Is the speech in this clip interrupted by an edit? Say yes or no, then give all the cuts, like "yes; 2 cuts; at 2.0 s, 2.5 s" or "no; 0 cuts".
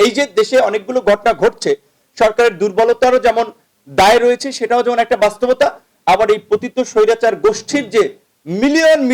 no; 0 cuts